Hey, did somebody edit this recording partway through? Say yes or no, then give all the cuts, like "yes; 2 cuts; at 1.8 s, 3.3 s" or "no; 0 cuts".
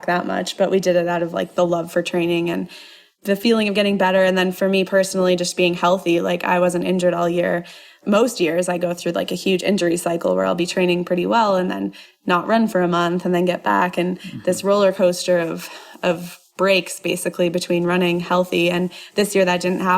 yes; 2 cuts; at 3.1 s, 8.0 s